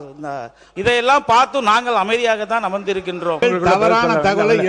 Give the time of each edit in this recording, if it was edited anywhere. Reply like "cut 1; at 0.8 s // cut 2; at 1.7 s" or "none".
cut 1; at 3.4 s